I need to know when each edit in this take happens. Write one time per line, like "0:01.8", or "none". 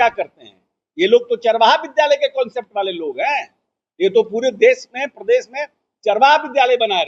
none